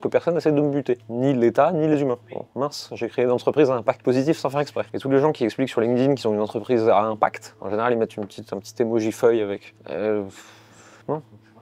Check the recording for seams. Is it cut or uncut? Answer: uncut